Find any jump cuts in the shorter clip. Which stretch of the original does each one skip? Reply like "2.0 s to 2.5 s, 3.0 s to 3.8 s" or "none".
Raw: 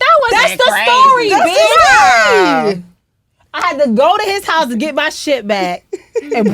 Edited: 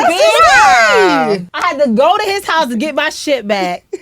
2.9 s to 3.5 s